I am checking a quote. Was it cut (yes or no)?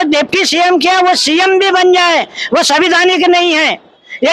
no